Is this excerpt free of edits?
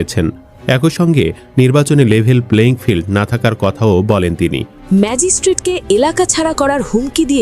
no; 1 cut; at 4.8 s

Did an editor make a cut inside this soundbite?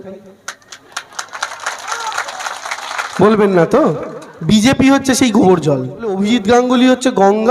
yes; 1 cut; at 6.2 s

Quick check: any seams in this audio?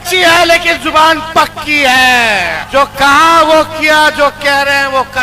yes; 1 cut; at 2.6 s

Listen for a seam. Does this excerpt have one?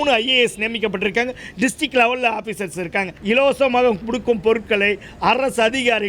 yes; 1 cut; at 3.1 s

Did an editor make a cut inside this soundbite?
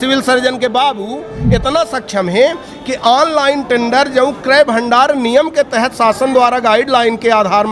no; 0 cuts

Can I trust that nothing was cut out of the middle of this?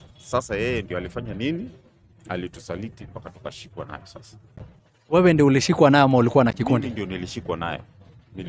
yes; 0 cuts

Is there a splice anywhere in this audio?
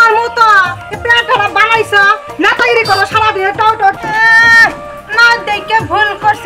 yes; 1 cut; at 4.0 s

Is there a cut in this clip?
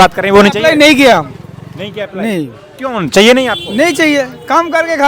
no; 0 cuts

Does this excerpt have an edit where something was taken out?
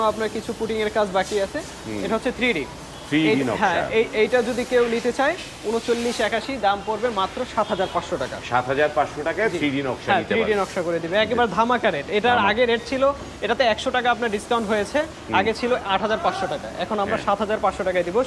no; 0 cuts

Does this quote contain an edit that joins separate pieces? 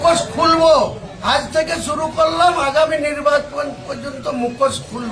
yes; 1 cut; at 1.1 s

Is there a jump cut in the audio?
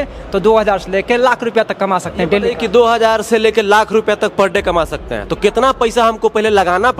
no; 0 cuts

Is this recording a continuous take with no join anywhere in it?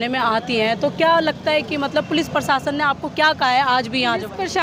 yes; 0 cuts

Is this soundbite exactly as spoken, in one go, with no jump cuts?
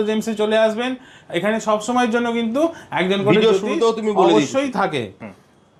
yes; 0 cuts

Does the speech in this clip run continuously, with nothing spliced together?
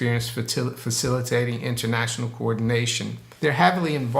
no; 1 cut; at 3.3 s

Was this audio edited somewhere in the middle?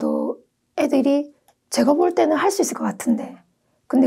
yes; 1 cut; at 1.4 s

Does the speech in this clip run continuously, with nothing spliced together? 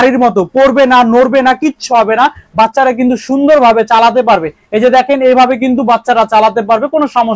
yes; 0 cuts

